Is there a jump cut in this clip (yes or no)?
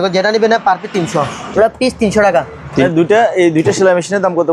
yes